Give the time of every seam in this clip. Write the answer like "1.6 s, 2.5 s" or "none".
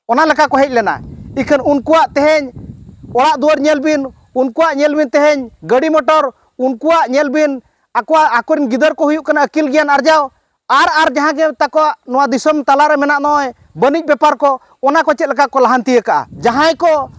16.3 s